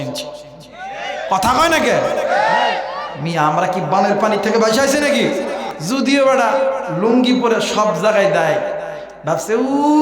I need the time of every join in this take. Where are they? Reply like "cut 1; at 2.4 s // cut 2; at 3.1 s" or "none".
cut 1; at 5.7 s